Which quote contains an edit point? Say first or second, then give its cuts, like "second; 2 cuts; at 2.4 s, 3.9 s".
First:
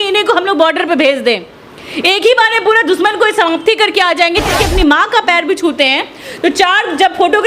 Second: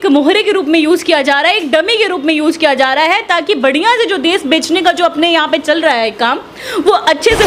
first; 1 cut; at 4.5 s